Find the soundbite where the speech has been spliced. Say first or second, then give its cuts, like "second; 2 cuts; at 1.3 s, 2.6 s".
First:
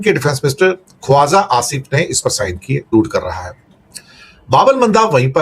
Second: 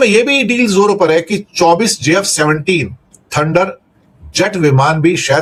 first; 1 cut; at 2.9 s